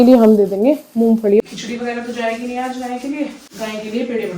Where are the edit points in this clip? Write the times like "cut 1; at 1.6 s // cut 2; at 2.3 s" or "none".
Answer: cut 1; at 1.4 s // cut 2; at 3.5 s